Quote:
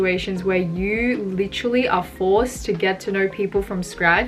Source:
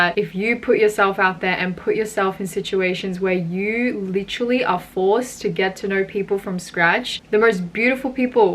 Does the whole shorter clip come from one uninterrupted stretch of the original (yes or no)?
yes